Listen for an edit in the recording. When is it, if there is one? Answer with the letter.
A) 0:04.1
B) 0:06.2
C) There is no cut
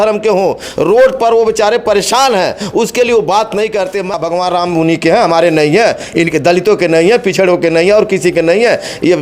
A